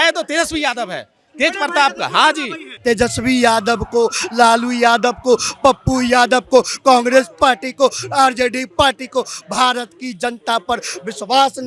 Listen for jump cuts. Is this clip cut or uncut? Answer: cut